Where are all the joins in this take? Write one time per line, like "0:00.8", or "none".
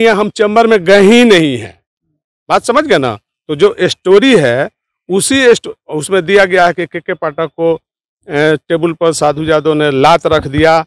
none